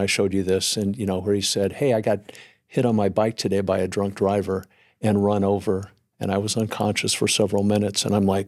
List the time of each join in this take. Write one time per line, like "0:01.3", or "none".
none